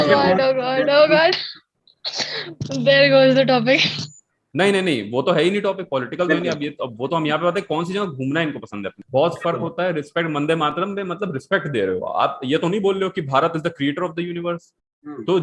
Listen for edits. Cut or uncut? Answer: cut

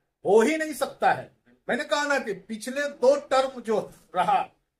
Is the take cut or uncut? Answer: uncut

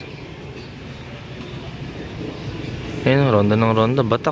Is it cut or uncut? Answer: uncut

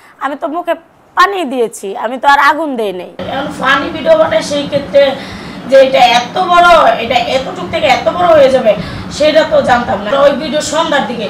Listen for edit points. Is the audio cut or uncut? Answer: cut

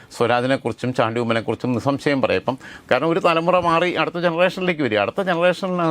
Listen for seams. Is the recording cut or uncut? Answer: uncut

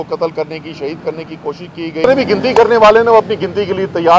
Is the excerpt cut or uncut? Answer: cut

